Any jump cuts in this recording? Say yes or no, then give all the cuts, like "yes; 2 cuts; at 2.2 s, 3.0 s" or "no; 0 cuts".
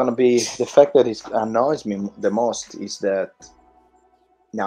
no; 0 cuts